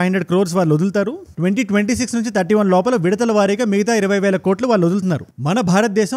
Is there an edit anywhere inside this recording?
no; 0 cuts

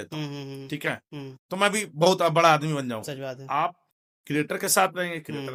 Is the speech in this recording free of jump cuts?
yes; 0 cuts

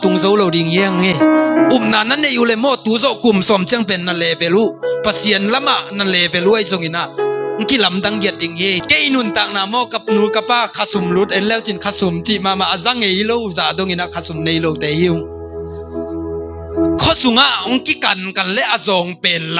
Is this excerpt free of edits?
no; 1 cut; at 8.8 s

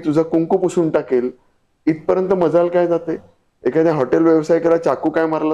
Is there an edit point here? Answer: no; 0 cuts

